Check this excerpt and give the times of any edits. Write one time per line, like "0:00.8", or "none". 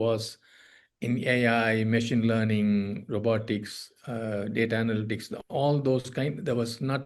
none